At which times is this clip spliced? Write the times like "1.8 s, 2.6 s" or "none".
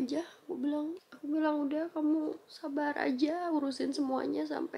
1.1 s

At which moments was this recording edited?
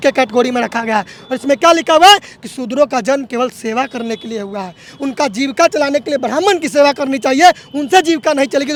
none

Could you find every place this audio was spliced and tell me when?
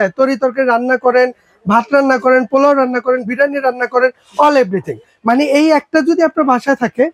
none

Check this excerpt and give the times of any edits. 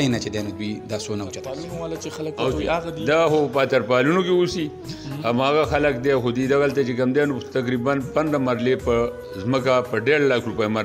1.7 s

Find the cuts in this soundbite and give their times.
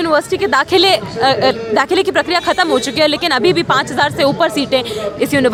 none

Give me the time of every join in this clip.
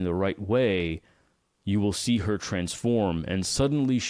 none

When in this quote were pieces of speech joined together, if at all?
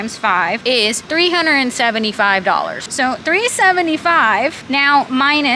0.9 s, 2.8 s, 4.6 s

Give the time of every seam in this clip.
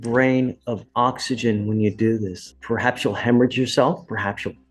2.4 s

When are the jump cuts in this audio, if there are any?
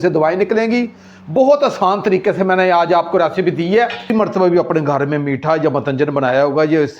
4.1 s

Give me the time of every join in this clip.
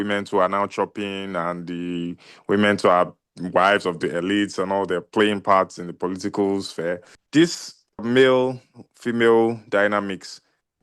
7.1 s, 8.1 s

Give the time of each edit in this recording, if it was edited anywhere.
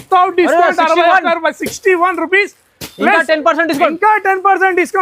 none

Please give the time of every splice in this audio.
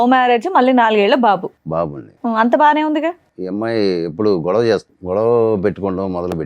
3.3 s, 4.9 s

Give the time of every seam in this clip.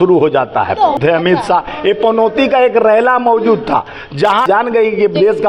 1.0 s, 4.4 s

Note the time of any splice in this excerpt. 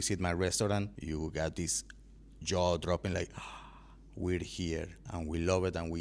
1.0 s, 5.0 s

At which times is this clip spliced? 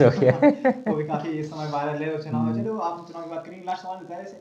none

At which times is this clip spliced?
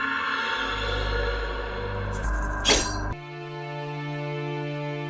2.3 s

